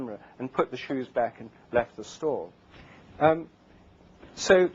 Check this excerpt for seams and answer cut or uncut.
uncut